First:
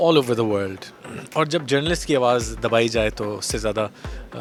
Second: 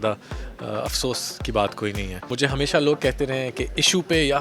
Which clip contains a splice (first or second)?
second